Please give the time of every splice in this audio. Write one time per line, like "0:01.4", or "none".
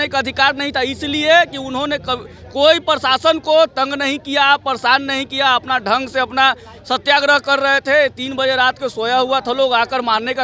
none